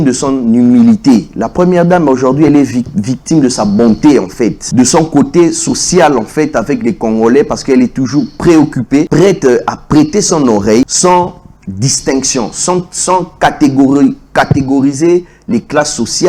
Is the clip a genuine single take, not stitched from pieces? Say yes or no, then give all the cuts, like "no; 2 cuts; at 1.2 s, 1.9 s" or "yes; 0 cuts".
no; 3 cuts; at 4.6 s, 9.1 s, 10.9 s